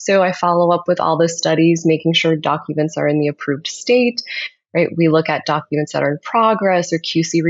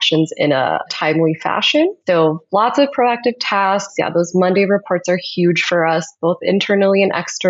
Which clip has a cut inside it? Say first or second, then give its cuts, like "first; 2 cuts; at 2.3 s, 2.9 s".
second; 2 cuts; at 0.9 s, 2.0 s